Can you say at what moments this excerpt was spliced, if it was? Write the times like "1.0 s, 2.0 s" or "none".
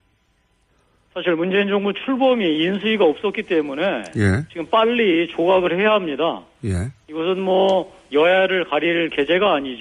1.2 s